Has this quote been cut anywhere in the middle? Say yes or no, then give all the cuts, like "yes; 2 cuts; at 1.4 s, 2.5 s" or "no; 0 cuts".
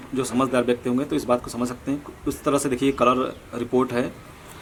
no; 0 cuts